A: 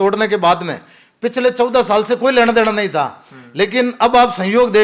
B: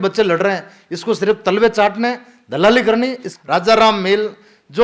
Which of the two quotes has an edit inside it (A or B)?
B